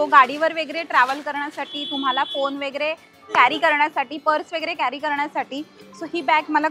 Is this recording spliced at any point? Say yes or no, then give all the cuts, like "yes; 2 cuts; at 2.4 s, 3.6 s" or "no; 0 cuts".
no; 0 cuts